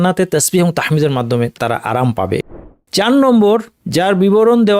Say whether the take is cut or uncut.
cut